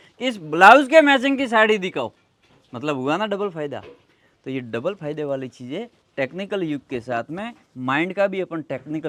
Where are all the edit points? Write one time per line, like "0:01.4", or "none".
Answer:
none